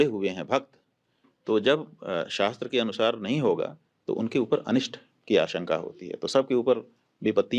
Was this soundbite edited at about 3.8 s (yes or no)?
no